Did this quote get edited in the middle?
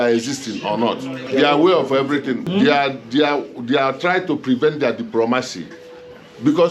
yes; 2 cuts; at 1.2 s, 2.4 s

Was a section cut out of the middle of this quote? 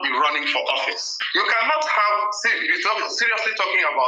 yes; 1 cut; at 1.2 s

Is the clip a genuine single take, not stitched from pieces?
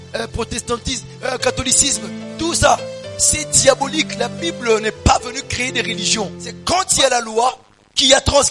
no; 1 cut; at 6.6 s

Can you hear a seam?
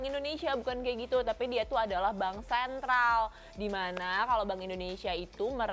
no; 0 cuts

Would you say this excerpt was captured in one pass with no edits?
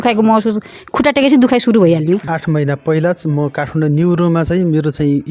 no; 1 cut; at 2.2 s

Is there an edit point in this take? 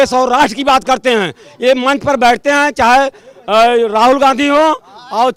no; 0 cuts

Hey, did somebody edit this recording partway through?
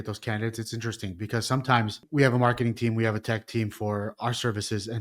yes; 1 cut; at 2.0 s

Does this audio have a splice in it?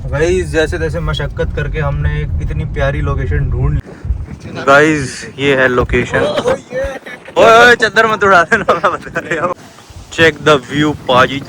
yes; 2 cuts; at 3.8 s, 9.6 s

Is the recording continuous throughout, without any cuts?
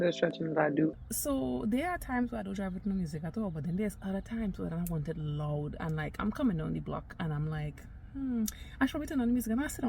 no; 1 cut; at 1.1 s

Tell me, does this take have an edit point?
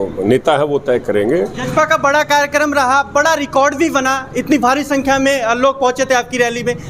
yes; 1 cut; at 1.6 s

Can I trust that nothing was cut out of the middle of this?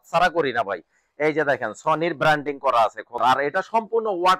no; 1 cut; at 3.2 s

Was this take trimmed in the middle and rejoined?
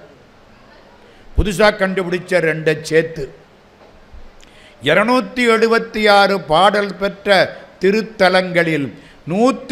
no; 0 cuts

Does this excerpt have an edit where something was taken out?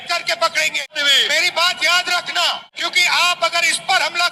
yes; 2 cuts; at 0.9 s, 2.8 s

